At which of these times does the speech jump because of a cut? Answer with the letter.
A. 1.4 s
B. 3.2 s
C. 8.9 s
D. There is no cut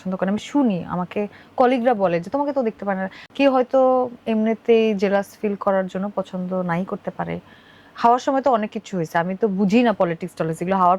B